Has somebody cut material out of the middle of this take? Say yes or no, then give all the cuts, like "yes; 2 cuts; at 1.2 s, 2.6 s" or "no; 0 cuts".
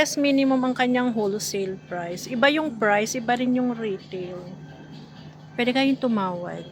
no; 0 cuts